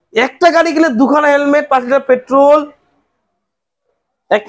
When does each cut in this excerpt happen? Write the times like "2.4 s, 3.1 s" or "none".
none